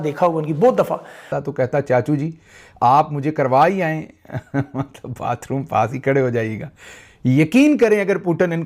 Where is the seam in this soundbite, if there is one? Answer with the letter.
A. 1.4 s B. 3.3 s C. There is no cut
A